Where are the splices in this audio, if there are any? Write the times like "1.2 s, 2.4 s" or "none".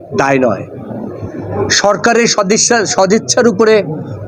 none